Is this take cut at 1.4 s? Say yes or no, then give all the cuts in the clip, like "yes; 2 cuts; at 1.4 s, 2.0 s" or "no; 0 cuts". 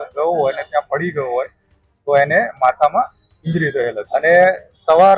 no; 1 cut; at 4.0 s